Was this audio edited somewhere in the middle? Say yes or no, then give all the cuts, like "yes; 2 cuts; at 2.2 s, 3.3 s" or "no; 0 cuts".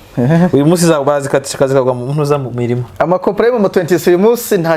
no; 0 cuts